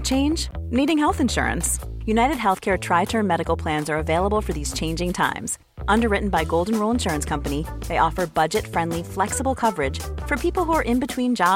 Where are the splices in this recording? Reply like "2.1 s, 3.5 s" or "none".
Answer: none